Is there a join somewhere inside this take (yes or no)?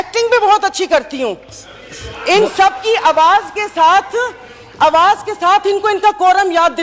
no